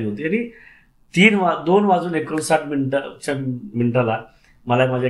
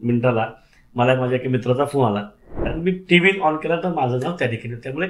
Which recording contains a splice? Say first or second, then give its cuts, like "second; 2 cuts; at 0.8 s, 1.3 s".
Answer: second; 1 cut; at 2.6 s